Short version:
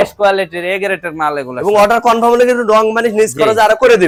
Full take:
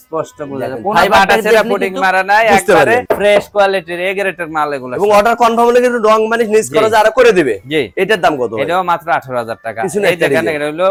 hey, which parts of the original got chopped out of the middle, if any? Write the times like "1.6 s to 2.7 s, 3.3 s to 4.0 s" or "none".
none